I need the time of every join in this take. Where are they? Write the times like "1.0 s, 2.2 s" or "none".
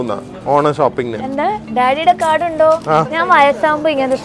3.1 s